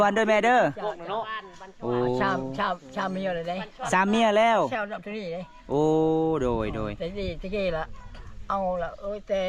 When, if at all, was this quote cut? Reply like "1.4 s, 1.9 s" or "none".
none